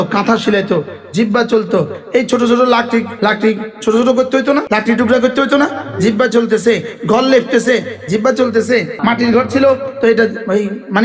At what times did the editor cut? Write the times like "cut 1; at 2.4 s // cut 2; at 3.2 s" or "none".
cut 1; at 3.1 s // cut 2; at 4.6 s // cut 3; at 8.9 s